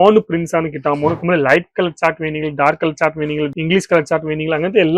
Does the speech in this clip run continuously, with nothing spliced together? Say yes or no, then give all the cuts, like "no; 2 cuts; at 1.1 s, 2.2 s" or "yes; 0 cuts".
no; 1 cut; at 1.2 s